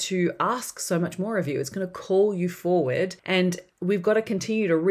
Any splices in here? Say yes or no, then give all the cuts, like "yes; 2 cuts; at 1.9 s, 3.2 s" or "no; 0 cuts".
yes; 1 cut; at 3.2 s